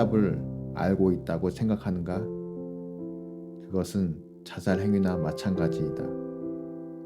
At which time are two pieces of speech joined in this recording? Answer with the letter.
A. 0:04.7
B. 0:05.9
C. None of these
B